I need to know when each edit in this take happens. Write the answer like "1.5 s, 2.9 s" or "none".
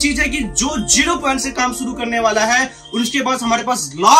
none

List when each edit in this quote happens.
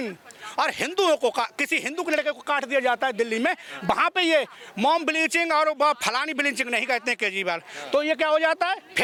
none

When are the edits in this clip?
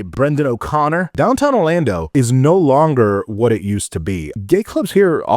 1.1 s, 2.1 s, 4.3 s

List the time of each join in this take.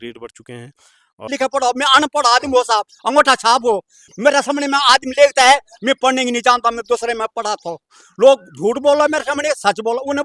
1.3 s

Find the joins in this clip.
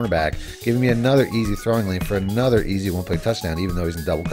none

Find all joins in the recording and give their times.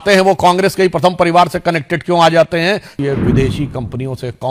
2.9 s

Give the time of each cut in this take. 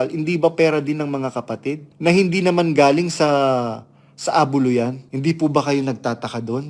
1.9 s, 5.1 s

